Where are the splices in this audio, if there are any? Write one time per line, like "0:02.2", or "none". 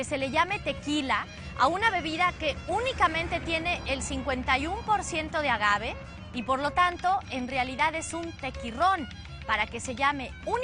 0:01.8